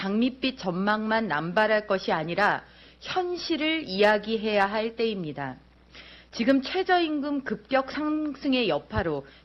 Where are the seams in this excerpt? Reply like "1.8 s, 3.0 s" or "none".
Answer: 6.4 s